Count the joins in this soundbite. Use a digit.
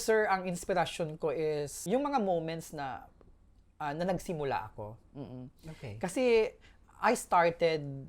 1